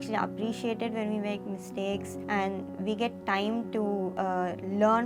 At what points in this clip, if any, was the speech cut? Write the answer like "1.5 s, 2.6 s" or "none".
2.1 s, 4.1 s